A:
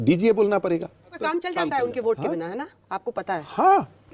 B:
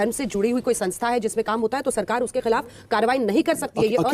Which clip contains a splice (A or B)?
A